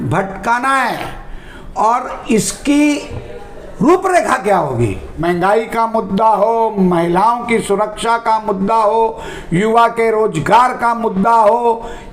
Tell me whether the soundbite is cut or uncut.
cut